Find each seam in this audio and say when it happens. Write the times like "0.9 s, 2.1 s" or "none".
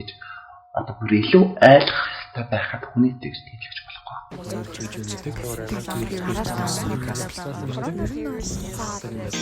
4.3 s